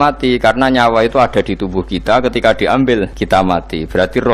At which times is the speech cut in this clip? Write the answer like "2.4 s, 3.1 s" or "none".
3.2 s